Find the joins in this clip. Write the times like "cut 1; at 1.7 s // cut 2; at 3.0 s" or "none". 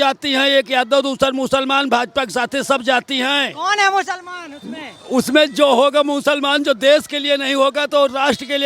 none